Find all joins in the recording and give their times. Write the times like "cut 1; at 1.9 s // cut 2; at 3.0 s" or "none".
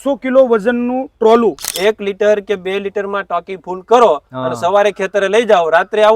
cut 1; at 1.7 s